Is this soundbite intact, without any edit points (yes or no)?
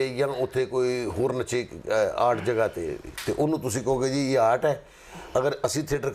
yes